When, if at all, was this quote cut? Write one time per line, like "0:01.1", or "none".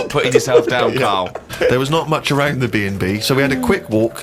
0:01.5